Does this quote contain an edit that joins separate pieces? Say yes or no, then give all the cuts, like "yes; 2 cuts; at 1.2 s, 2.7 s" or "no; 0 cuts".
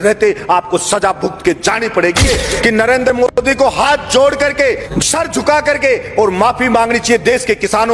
yes; 2 cuts; at 2.3 s, 4.9 s